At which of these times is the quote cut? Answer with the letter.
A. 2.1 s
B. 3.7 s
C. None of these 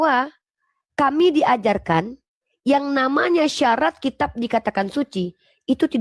C